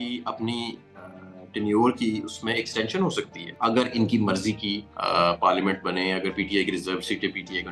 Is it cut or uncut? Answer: uncut